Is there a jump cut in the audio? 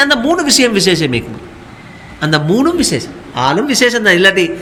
no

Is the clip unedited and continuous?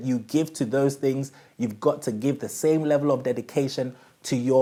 yes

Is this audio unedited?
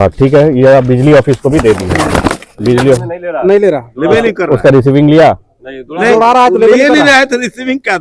yes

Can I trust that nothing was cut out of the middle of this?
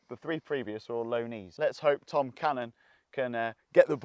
no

